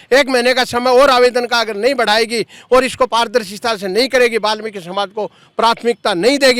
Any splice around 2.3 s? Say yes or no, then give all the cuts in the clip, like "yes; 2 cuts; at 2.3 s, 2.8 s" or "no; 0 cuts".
no; 0 cuts